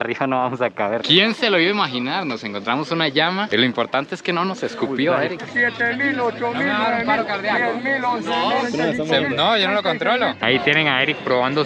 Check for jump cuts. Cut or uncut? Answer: cut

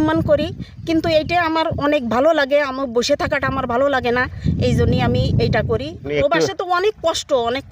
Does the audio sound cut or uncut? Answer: cut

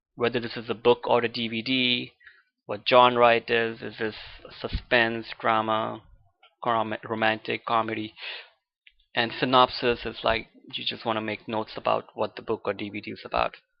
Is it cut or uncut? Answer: cut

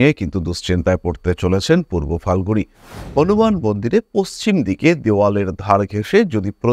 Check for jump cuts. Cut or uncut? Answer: cut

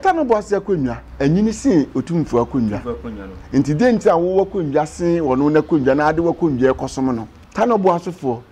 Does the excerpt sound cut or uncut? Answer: cut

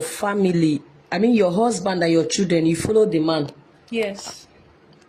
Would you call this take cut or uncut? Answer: uncut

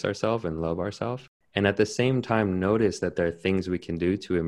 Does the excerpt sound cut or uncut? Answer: cut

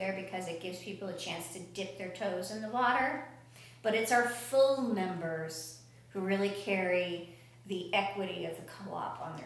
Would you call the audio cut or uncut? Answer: uncut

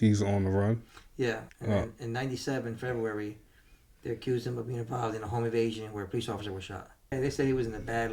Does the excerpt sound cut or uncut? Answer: cut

